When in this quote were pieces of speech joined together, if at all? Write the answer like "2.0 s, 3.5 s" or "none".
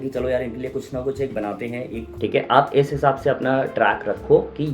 2.0 s